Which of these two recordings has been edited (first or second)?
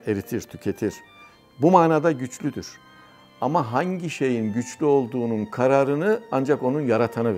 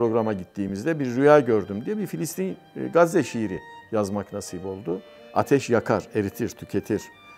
second